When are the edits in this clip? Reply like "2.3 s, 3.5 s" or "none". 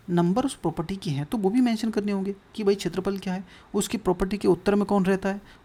none